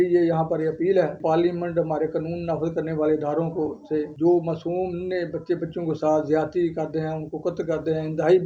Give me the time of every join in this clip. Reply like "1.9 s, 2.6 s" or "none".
1.2 s, 4.1 s